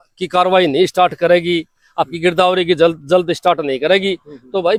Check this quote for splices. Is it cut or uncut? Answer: uncut